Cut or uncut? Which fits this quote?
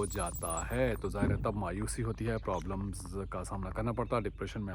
uncut